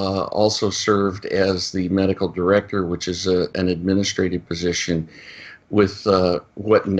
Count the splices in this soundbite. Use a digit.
1